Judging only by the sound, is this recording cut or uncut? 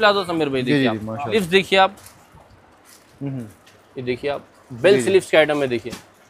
cut